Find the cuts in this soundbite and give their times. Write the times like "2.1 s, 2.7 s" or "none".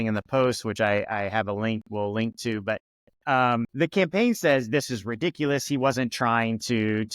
3.7 s